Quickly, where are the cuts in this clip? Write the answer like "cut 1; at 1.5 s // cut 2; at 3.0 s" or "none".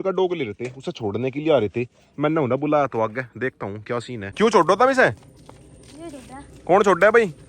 cut 1; at 4.2 s